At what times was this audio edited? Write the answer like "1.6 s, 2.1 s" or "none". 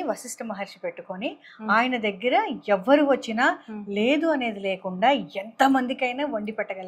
none